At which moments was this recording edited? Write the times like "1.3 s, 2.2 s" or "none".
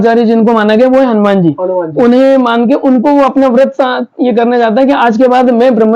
none

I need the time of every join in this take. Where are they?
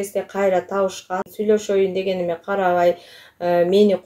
1.2 s

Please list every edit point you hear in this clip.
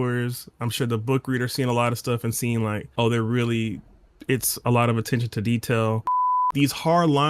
2.8 s, 6.1 s

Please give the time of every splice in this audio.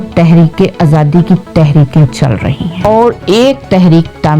2.9 s

